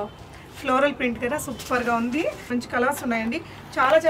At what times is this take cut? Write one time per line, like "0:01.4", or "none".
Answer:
0:02.5

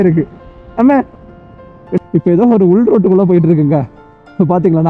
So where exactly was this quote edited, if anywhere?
0:01.9

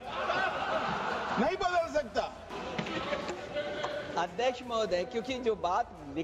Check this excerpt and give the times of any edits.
0:02.5

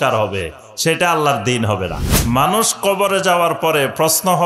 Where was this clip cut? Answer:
0:02.1

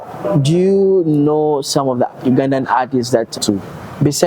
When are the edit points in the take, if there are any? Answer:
0:03.4

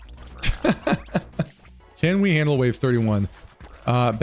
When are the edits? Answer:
0:01.8

